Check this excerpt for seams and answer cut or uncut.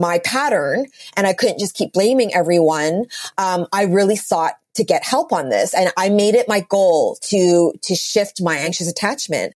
cut